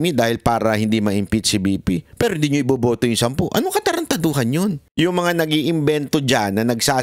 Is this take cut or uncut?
cut